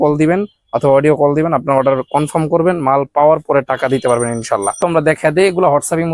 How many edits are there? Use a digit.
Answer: 1